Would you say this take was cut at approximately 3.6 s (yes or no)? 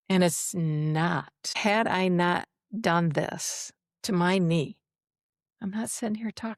no